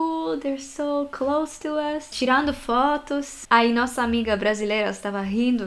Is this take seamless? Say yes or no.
yes